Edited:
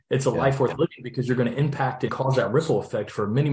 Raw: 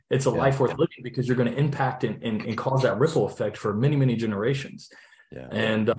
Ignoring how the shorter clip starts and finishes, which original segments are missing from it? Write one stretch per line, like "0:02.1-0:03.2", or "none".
0:02.1-0:02.6

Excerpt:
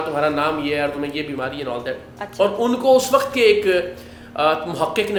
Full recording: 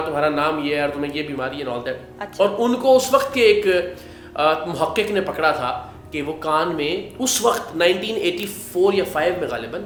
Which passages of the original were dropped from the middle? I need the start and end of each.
none

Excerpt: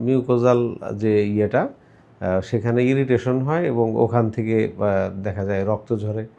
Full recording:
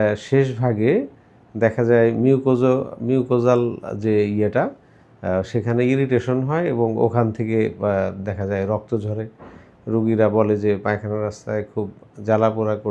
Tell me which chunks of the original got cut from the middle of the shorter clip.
none

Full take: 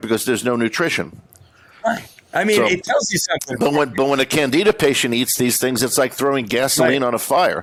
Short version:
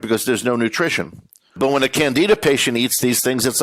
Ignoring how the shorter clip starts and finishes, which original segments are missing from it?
0:01.5-0:03.9

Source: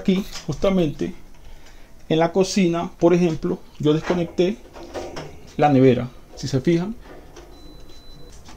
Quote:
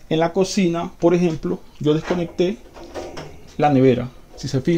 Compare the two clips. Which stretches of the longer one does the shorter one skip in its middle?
none

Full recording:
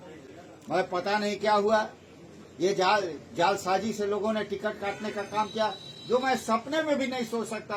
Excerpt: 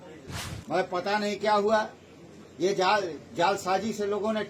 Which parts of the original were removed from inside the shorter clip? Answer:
none

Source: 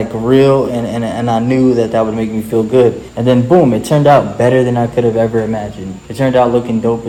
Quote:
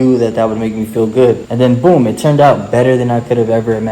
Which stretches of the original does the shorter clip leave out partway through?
0:03.0-0:03.1

